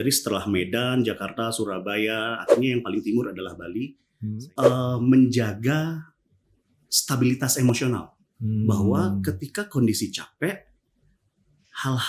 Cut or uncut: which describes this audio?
cut